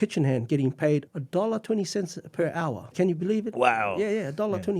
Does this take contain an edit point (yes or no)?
yes